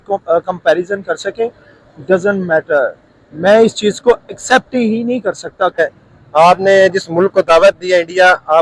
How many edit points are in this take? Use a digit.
1